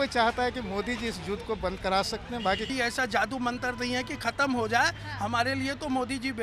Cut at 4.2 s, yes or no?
no